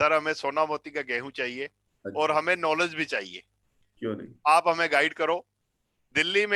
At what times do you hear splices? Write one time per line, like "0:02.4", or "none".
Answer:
none

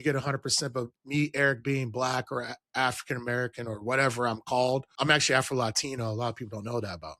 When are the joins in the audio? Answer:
0:04.9

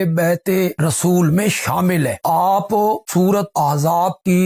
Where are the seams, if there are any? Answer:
none

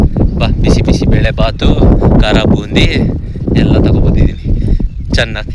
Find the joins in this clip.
none

